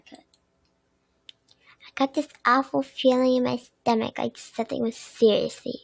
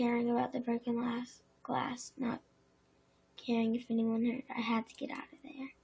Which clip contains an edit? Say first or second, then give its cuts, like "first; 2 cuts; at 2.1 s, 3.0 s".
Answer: first; 1 cut; at 1.2 s